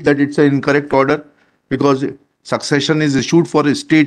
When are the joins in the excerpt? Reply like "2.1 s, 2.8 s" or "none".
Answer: none

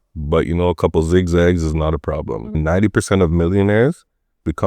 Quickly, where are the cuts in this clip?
2.6 s

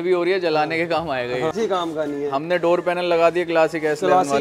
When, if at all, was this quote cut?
1.5 s

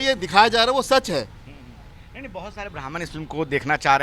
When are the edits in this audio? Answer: none

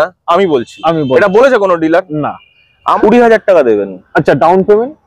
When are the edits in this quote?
3.0 s

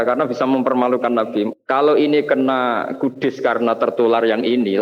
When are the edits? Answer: 1.6 s

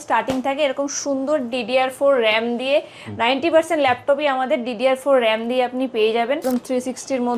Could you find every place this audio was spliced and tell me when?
6.5 s

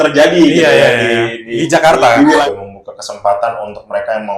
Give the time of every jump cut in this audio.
2.4 s

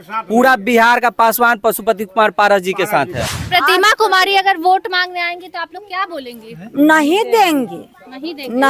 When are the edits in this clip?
3.4 s

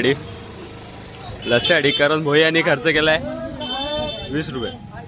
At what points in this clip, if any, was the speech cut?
none

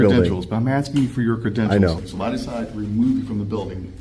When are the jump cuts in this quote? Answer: 2.1 s

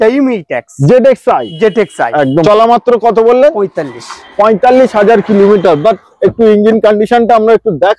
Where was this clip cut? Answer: 2.4 s

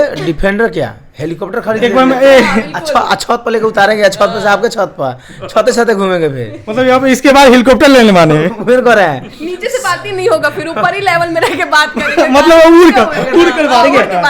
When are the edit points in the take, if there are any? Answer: none

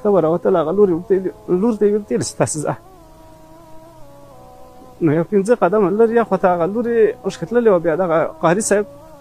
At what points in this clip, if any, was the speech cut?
none

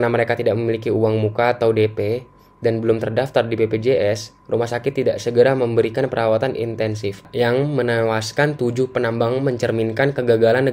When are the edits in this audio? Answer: 7.3 s

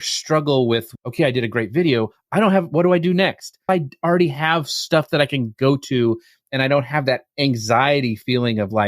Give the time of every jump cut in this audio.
1.0 s, 3.7 s

